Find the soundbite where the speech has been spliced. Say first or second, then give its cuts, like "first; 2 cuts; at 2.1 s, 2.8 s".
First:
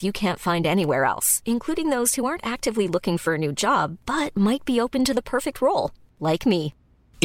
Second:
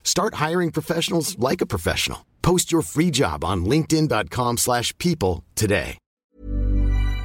second; 1 cut; at 6.2 s